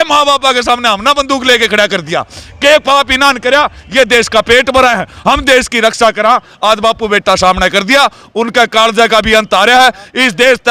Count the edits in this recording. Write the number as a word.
zero